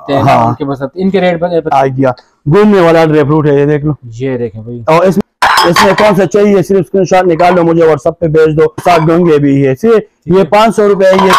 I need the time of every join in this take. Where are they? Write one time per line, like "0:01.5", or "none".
0:01.7
0:05.2
0:08.8